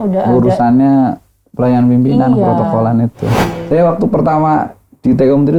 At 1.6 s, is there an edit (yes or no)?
no